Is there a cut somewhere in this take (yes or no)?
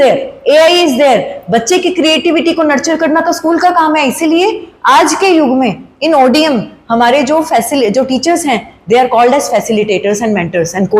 no